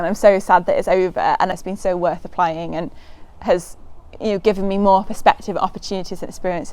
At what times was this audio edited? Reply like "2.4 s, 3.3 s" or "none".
1.6 s